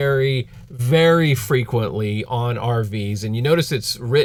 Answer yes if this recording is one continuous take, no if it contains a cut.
yes